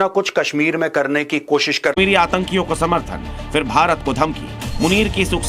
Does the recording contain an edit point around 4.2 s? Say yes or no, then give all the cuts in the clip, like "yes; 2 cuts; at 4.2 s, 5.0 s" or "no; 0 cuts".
no; 1 cut; at 1.9 s